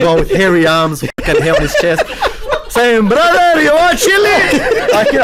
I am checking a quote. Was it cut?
no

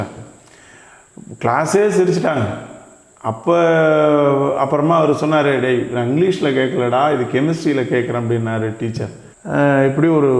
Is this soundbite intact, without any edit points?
yes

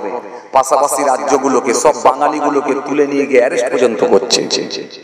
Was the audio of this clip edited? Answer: no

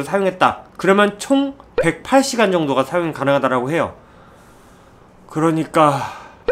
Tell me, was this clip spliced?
no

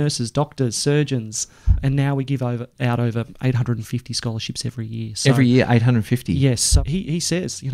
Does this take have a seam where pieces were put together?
yes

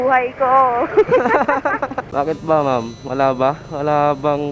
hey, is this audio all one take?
no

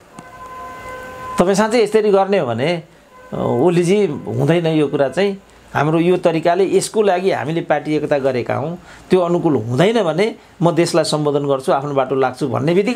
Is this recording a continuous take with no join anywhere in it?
yes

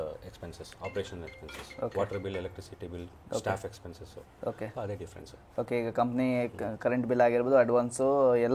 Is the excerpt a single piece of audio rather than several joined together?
yes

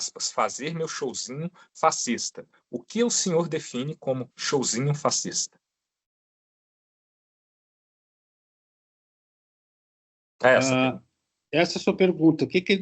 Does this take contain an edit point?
no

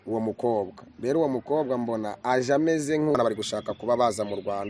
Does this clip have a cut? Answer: yes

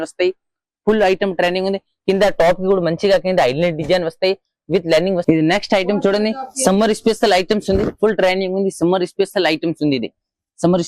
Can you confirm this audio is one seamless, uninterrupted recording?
no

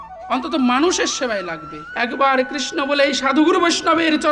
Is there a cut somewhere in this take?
yes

